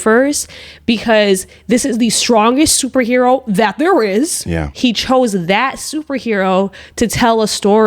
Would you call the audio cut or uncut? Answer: cut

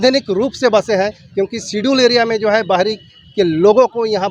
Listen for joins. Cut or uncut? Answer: uncut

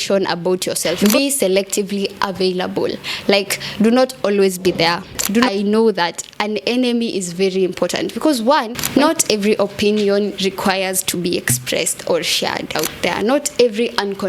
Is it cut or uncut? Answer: cut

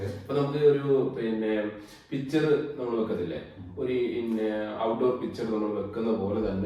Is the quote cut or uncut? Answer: uncut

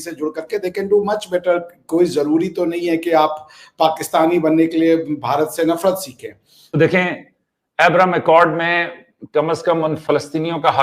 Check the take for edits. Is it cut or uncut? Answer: cut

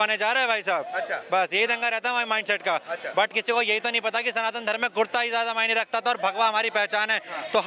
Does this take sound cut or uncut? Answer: uncut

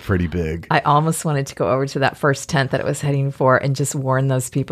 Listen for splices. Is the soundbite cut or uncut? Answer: uncut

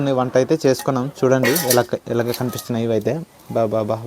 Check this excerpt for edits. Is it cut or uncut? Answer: uncut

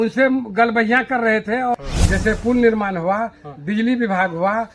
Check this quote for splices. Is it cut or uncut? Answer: cut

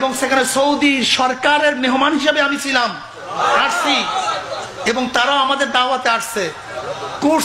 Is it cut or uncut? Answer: uncut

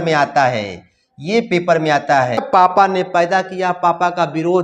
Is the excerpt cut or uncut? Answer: cut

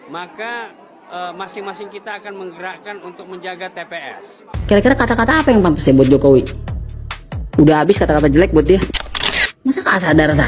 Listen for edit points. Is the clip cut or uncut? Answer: cut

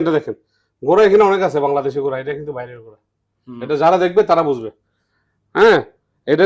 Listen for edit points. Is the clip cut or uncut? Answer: uncut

